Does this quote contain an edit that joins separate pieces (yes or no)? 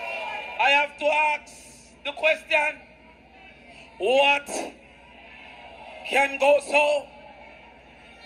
no